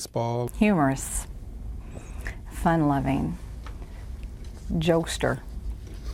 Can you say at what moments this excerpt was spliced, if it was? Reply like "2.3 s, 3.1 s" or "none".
none